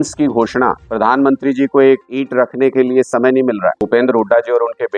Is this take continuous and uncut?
no; 3 cuts; at 0.8 s, 2.2 s, 3.8 s

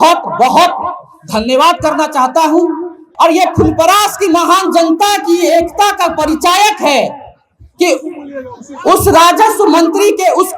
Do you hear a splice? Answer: yes; 1 cut; at 3.0 s

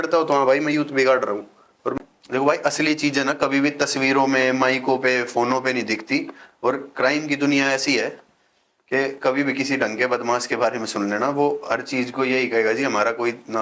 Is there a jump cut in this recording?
yes; 1 cut; at 2.0 s

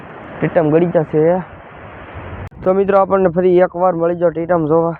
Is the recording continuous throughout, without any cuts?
no; 1 cut; at 2.5 s

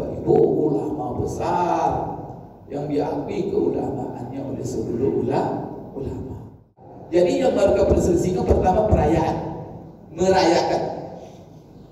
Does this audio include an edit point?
yes; 1 cut; at 7.0 s

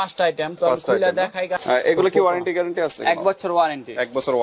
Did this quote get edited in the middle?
yes; 1 cut; at 1.6 s

